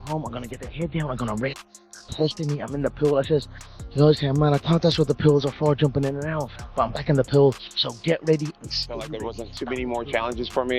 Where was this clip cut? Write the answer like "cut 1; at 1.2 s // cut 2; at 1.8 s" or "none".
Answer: cut 1; at 9.1 s